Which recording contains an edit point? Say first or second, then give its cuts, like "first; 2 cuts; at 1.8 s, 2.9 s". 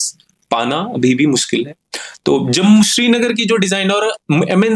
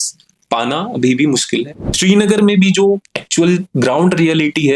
second; 1 cut; at 1.9 s